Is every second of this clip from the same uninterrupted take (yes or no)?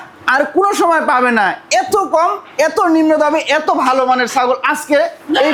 yes